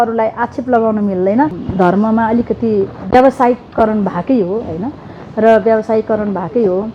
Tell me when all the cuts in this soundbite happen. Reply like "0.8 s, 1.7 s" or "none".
1.6 s